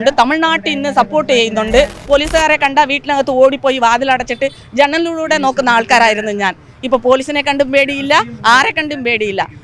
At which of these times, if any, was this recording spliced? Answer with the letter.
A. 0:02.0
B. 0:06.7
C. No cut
A